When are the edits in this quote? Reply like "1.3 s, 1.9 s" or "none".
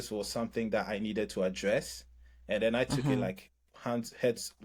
none